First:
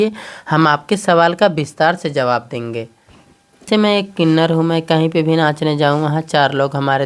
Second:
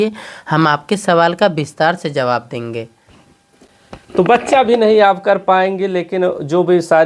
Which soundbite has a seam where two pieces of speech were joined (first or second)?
first